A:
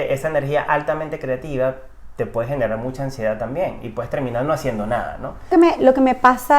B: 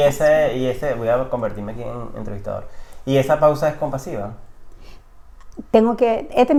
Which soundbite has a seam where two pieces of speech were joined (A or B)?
A